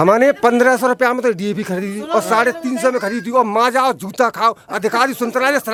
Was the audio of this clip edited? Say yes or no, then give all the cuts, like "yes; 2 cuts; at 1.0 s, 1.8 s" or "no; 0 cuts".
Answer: no; 0 cuts